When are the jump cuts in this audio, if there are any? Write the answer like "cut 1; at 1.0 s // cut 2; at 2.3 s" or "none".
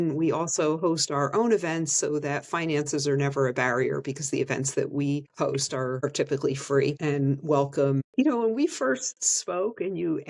cut 1; at 5.6 s // cut 2; at 7.0 s // cut 3; at 8.1 s